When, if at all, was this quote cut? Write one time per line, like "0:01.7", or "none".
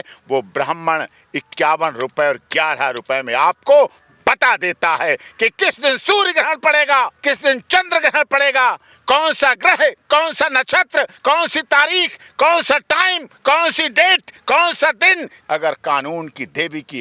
0:07.2
0:15.3